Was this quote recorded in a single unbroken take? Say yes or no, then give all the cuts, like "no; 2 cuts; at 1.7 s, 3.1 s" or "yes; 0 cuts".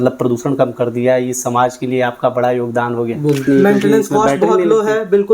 no; 1 cut; at 3.4 s